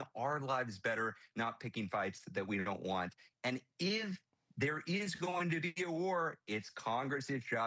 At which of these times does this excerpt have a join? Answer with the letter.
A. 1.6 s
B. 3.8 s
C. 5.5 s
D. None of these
D